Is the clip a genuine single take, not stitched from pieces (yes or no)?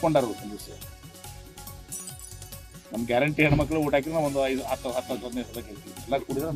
yes